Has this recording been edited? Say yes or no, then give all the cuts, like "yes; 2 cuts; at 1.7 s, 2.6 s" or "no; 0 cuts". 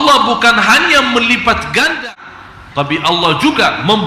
yes; 1 cut; at 2.1 s